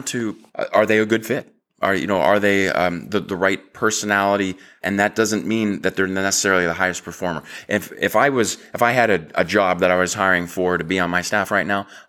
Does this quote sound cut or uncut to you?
uncut